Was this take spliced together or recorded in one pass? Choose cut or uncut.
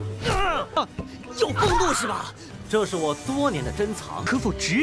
cut